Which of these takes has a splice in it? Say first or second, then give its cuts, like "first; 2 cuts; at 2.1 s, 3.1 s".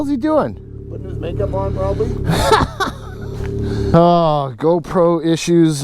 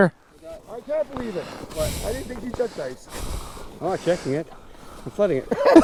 first; 1 cut; at 3.9 s